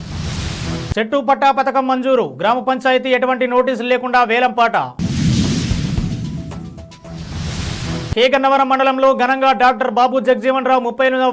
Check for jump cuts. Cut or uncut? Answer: uncut